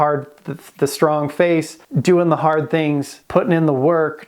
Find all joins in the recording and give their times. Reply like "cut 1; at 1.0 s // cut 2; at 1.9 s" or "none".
cut 1; at 1.8 s // cut 2; at 3.1 s